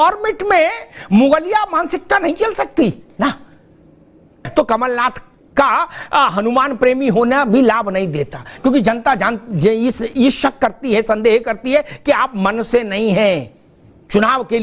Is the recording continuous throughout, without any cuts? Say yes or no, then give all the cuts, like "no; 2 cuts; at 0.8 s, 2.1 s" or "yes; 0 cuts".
no; 1 cut; at 4.5 s